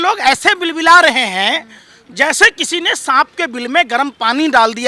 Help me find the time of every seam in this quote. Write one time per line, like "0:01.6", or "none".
none